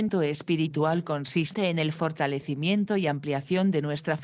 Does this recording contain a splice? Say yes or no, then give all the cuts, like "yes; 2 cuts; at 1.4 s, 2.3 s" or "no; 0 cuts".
yes; 1 cut; at 1.7 s